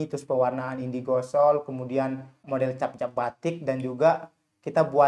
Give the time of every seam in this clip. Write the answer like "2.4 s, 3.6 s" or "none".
2.4 s